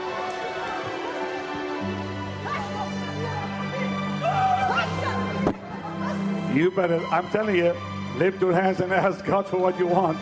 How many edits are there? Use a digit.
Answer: 0